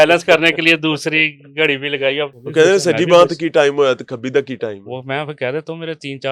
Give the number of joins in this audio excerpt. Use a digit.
1